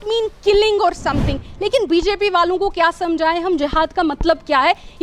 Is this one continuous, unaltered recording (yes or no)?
yes